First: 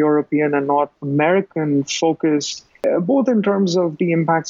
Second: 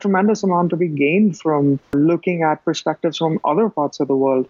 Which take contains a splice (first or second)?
first